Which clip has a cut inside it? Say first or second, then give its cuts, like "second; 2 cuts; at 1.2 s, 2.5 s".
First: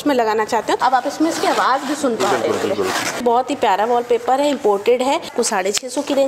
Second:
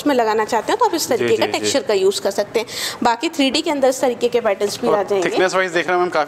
first; 3 cuts; at 0.8 s, 3.2 s, 5.3 s